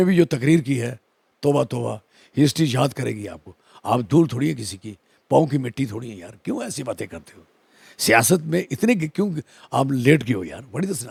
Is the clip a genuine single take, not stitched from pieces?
yes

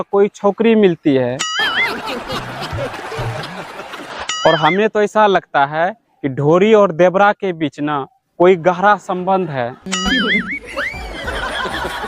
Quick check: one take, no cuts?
no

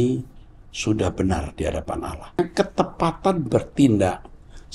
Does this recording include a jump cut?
yes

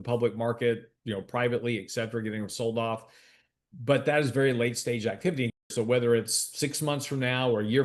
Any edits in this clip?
yes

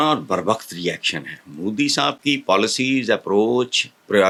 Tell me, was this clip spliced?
no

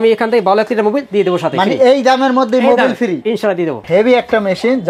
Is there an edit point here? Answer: yes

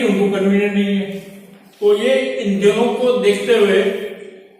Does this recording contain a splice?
no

